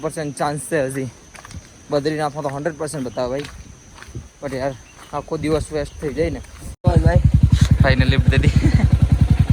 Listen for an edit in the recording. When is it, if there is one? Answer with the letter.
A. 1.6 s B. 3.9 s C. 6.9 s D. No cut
C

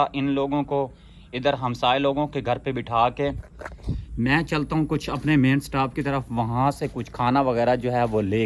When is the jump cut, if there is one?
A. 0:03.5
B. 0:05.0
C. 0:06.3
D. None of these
D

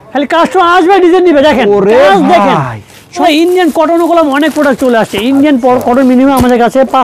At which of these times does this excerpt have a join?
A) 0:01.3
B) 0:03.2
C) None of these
B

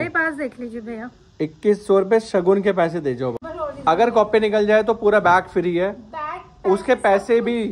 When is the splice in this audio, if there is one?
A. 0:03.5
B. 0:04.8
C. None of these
A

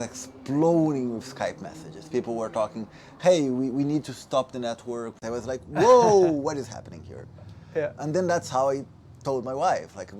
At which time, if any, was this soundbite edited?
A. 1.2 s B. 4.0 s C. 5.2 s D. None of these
C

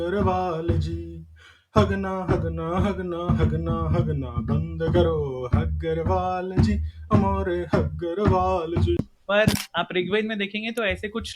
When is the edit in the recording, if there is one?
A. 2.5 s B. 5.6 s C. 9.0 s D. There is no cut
C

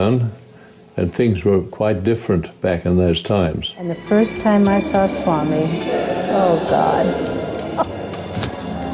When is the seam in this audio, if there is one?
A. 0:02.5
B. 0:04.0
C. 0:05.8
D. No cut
B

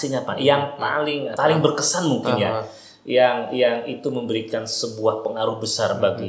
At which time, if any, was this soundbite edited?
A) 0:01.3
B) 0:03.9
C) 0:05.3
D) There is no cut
A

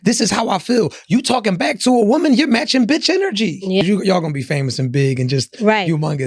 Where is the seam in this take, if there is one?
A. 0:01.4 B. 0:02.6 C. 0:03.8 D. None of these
C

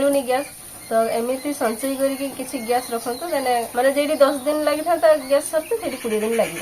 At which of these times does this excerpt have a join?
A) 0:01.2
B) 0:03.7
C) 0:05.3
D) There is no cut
B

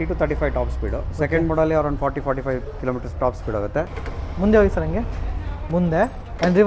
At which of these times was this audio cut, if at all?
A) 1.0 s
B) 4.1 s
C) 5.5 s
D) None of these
B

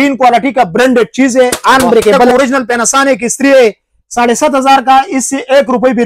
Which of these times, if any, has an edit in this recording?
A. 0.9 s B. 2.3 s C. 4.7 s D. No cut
B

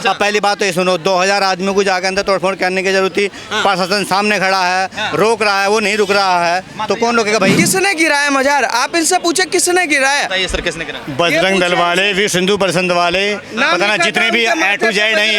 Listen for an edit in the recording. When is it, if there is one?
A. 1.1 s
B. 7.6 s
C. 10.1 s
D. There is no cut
B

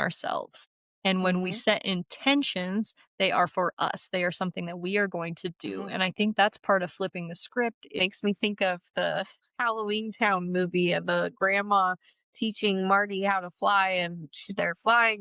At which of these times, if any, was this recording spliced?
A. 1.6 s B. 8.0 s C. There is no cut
B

